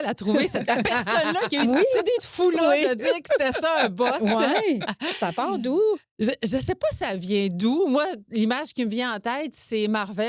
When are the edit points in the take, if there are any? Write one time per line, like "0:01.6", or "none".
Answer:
none